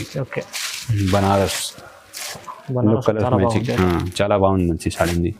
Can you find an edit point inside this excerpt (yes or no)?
no